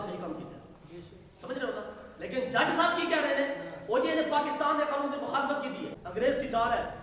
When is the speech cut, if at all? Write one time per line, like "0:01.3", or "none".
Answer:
0:06.0